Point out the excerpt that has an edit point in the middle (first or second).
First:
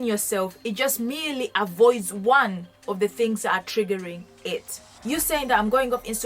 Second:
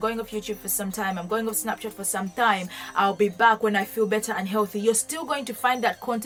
first